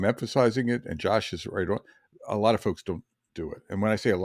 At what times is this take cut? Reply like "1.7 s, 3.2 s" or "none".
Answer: none